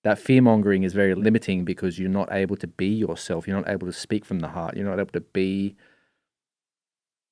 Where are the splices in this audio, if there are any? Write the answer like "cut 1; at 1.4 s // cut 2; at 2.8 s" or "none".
cut 1; at 1.2 s